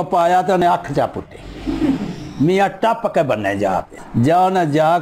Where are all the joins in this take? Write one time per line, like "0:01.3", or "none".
0:04.0